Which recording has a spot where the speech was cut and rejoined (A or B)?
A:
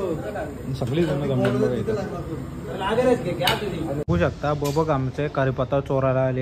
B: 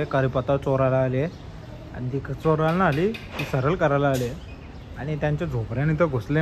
A